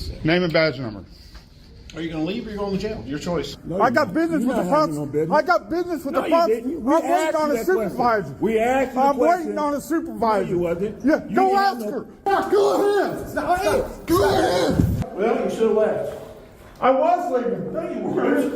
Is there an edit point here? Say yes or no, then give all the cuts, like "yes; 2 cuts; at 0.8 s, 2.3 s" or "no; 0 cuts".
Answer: yes; 3 cuts; at 3.5 s, 12.3 s, 15.0 s